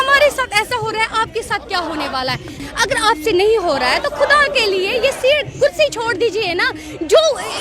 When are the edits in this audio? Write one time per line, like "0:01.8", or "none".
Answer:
0:02.5